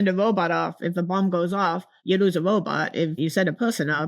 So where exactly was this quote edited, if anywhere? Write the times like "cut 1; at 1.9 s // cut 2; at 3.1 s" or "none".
cut 1; at 1.9 s // cut 2; at 3.2 s